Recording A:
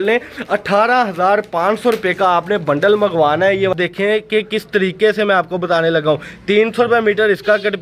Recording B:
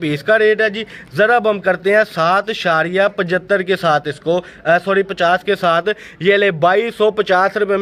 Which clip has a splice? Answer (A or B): A